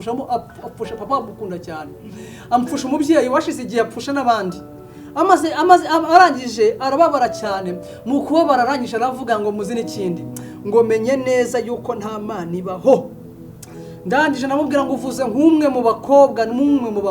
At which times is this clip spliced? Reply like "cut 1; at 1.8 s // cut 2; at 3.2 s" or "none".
none